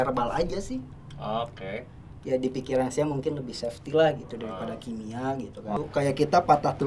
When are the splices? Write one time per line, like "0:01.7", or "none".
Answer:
0:05.7